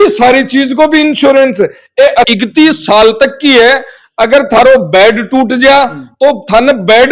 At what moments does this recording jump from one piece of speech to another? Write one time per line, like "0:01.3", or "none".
0:02.3